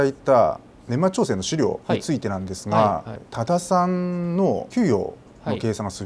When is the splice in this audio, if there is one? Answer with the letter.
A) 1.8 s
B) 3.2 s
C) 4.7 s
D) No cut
B